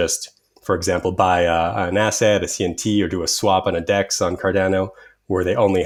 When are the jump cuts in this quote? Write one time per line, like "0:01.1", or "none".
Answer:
none